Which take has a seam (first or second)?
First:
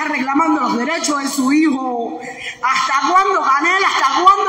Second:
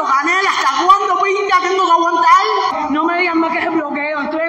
second